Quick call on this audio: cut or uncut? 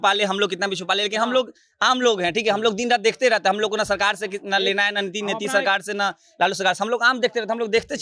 uncut